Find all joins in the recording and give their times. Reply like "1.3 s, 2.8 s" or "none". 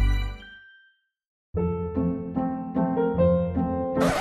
1.4 s